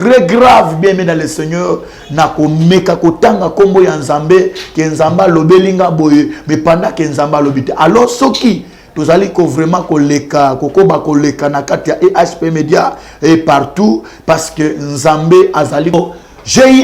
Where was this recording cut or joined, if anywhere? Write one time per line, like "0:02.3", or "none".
0:15.9